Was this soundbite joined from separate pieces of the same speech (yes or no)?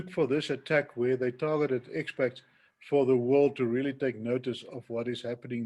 no